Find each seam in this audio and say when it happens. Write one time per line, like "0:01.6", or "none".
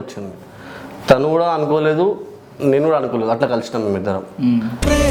none